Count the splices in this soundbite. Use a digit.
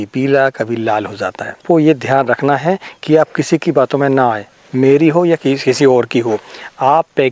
1